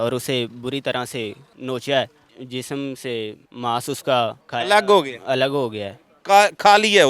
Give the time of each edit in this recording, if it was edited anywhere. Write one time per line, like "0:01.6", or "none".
0:01.5
0:02.4
0:03.4
0:04.4